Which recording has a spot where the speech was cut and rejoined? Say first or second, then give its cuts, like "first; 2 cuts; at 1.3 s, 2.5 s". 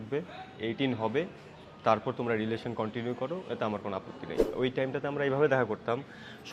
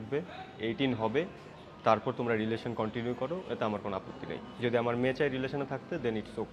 first; 1 cut; at 4.5 s